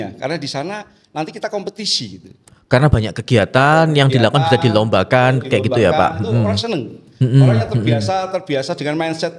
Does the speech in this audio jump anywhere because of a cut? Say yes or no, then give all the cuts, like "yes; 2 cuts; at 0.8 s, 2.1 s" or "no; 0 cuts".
no; 0 cuts